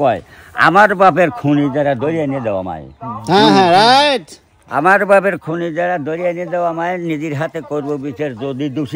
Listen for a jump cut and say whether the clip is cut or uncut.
uncut